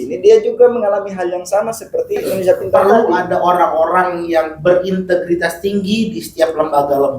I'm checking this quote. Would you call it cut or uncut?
cut